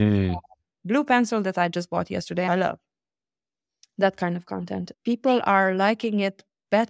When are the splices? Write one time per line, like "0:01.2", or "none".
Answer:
0:02.5
0:05.0